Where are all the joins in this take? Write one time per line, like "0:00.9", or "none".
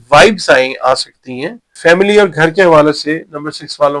0:01.7